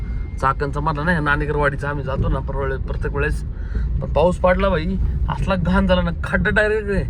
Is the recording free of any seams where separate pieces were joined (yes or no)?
yes